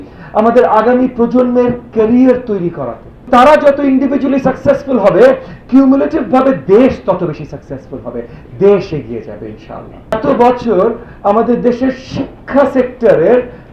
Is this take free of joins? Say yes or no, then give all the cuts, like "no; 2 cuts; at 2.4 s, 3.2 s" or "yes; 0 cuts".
no; 2 cuts; at 3.3 s, 10.1 s